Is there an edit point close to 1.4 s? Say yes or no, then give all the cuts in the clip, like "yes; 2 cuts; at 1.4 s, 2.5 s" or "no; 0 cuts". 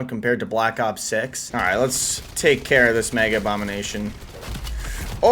yes; 1 cut; at 1.4 s